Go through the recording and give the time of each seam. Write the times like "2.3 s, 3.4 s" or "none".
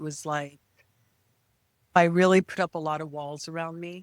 2.0 s

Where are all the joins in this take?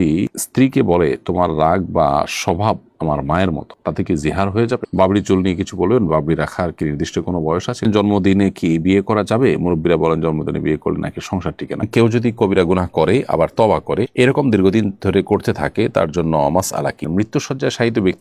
4.9 s, 7.9 s, 11.9 s, 17.1 s

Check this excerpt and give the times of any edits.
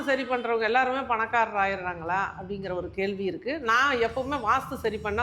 none

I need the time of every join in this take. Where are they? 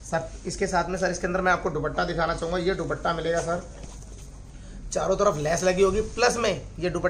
none

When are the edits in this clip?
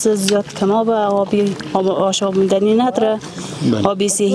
none

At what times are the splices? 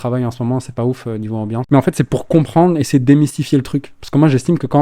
1.6 s

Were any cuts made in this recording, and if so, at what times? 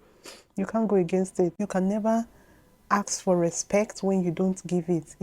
1.5 s

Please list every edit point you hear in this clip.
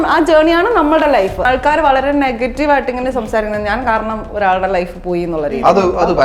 1.4 s

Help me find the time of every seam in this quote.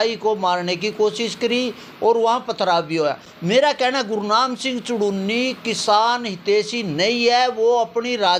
none

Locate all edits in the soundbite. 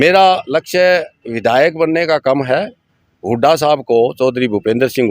none

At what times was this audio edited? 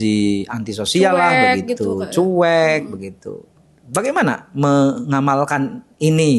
none

